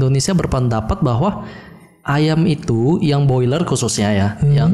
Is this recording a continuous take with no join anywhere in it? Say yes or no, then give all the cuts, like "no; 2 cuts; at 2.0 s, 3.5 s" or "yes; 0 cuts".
yes; 0 cuts